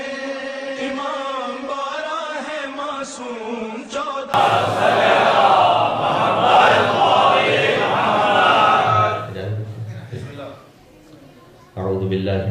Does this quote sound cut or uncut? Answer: uncut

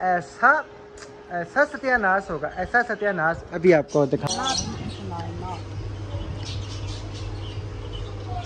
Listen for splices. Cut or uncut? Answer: cut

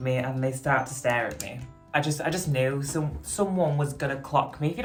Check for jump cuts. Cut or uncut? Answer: uncut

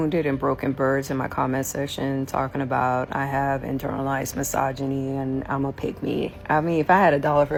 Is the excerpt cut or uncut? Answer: uncut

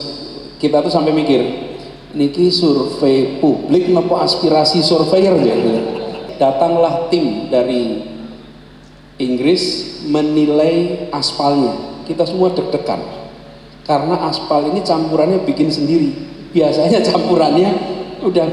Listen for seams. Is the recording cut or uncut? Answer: cut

